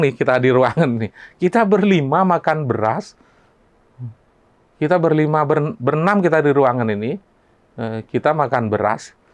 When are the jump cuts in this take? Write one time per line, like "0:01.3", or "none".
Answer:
none

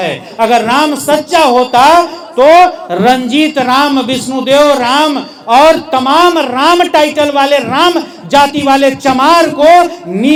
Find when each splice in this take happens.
none

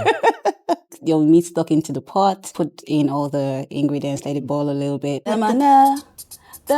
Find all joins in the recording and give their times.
0:00.9
0:05.4

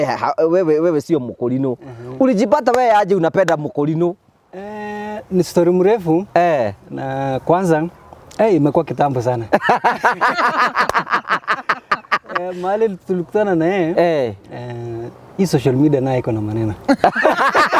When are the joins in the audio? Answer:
none

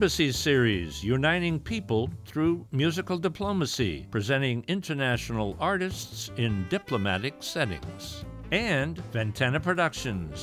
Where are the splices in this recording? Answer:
0:04.0
0:09.0

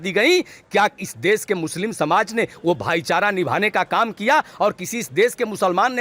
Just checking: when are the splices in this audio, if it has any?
none

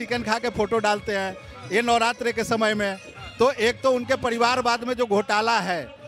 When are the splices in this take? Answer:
none

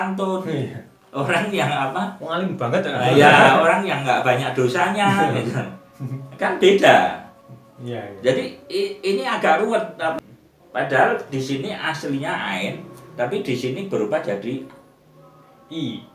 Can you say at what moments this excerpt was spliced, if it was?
0:10.2

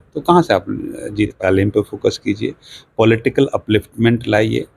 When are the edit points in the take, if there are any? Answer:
0:01.4

